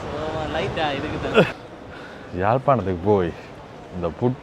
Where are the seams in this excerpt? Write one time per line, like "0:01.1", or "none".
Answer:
0:01.5

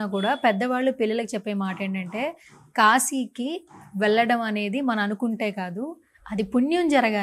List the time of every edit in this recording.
none

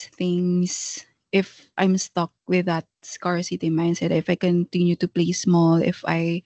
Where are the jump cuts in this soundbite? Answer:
none

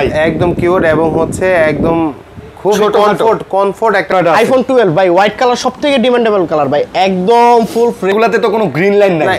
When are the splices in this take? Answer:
0:04.1
0:08.1

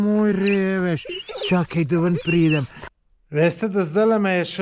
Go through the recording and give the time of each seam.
0:02.8

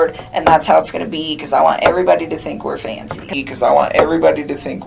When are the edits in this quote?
0:03.2

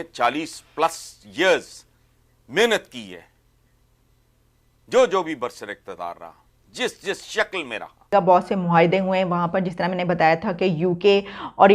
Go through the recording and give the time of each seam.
0:08.1

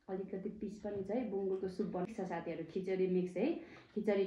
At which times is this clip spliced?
0:02.1

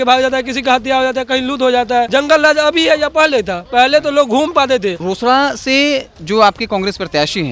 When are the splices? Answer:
0:02.1
0:05.0

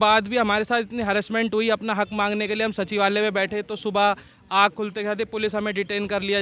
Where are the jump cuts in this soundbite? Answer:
none

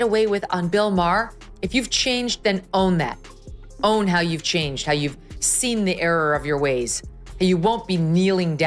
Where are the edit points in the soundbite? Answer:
0:01.4

